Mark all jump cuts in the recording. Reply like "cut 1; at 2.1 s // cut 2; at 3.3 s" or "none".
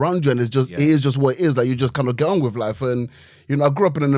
none